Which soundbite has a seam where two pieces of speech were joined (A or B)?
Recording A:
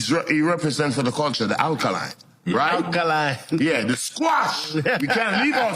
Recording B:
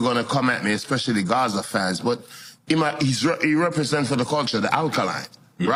A